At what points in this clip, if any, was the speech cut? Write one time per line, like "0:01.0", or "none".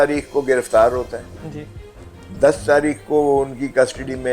none